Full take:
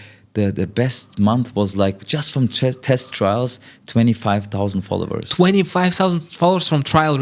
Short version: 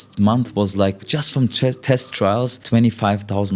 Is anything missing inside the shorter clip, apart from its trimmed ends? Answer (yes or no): yes